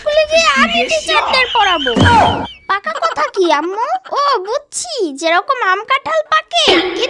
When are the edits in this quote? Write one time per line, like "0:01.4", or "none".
0:02.6